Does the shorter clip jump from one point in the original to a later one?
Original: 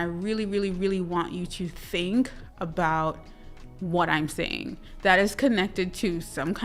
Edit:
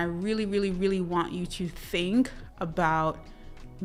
no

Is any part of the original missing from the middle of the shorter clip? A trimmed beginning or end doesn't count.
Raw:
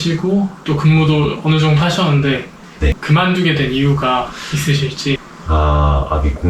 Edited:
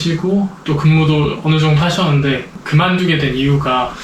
yes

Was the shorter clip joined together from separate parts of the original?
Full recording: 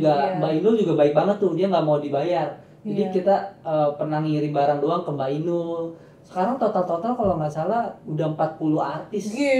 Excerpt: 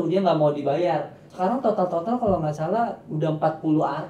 yes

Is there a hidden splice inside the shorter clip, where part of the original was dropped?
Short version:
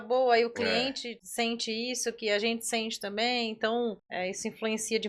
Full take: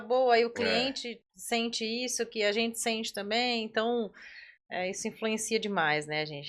yes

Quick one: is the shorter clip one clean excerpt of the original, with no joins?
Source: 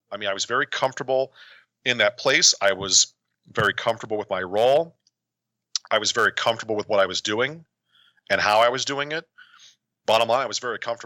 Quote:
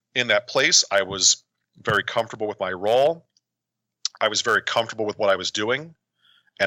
yes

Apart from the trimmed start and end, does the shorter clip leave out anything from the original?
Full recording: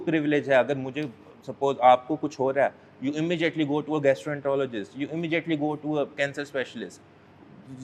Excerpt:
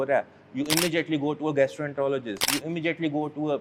no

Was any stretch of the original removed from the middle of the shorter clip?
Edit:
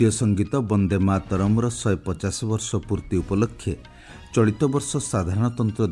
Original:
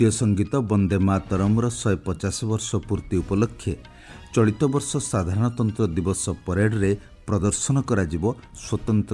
no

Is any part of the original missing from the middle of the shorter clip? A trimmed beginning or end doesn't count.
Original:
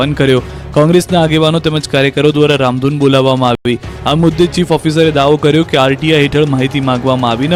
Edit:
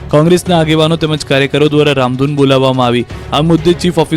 yes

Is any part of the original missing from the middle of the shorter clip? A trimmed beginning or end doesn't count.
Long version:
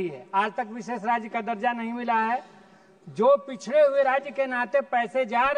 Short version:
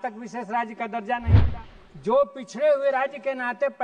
yes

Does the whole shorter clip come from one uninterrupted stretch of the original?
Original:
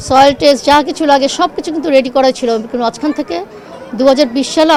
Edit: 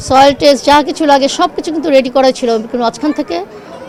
yes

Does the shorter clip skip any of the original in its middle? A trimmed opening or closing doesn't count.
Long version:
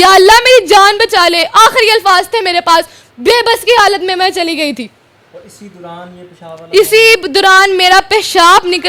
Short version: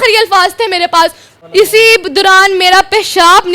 yes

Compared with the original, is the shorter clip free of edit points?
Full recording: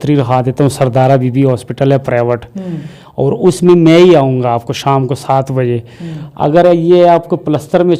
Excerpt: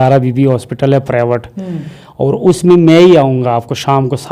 yes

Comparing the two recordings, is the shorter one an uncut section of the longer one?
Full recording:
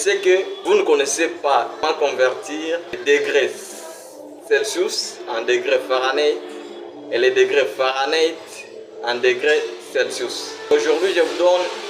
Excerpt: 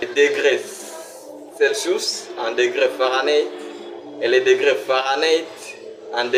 yes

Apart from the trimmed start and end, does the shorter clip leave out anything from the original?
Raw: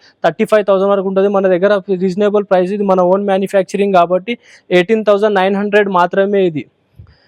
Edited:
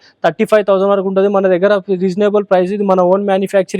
no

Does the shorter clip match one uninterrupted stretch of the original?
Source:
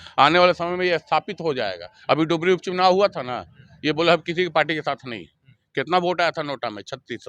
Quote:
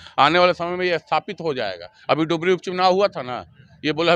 yes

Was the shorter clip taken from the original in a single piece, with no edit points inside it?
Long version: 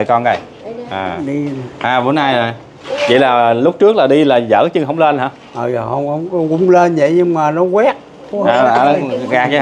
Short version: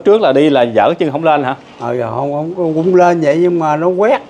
yes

